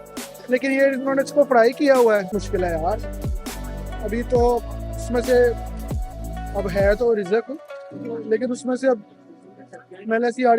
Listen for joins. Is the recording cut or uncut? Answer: cut